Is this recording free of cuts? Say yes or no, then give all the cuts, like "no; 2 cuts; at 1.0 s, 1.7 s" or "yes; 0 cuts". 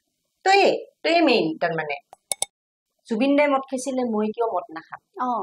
no; 1 cut; at 2.5 s